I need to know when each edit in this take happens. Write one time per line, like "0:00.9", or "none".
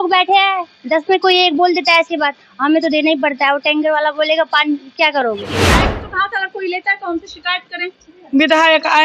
0:05.9

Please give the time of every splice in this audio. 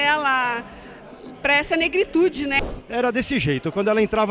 0:02.5

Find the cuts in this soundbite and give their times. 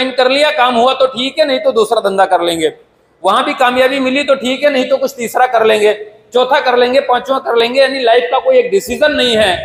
none

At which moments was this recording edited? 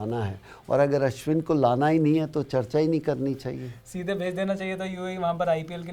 none

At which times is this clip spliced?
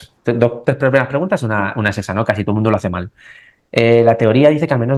none

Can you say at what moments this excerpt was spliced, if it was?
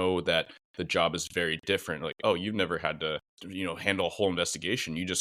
0:03.4

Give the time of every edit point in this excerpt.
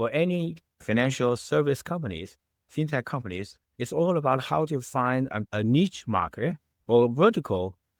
none

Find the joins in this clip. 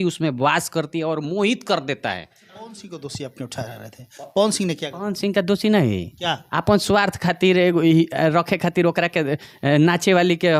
0:02.8

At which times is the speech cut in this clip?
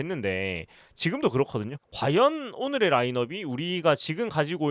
0:01.8

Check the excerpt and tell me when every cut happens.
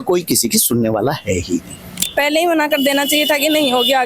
0:02.0

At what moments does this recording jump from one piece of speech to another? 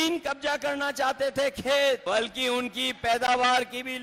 0:02.0

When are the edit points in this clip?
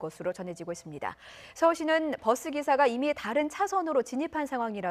0:02.9

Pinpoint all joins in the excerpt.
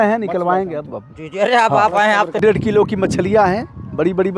0:02.4

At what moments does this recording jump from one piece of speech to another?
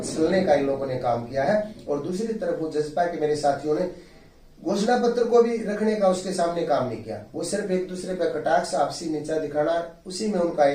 none

